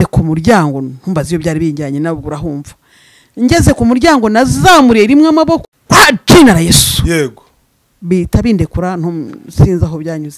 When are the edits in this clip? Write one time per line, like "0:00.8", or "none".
none